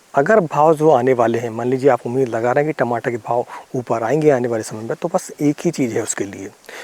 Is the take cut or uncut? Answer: uncut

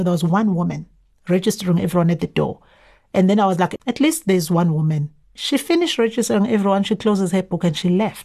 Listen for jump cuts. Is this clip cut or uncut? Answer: cut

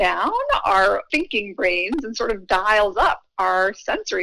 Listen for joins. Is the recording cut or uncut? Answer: cut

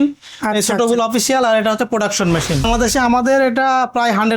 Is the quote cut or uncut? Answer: cut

